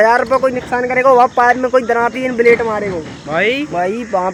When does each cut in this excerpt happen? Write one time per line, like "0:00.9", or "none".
none